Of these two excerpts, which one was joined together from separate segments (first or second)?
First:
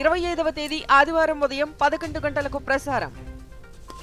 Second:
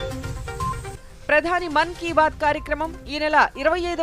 second